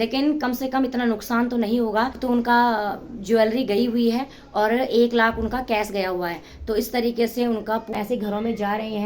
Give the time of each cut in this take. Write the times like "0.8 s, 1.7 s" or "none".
2.2 s, 7.9 s